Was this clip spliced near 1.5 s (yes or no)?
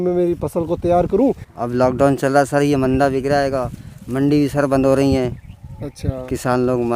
yes